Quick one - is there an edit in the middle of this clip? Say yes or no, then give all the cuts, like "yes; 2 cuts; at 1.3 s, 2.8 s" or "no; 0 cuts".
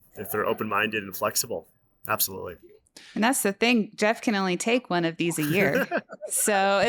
no; 0 cuts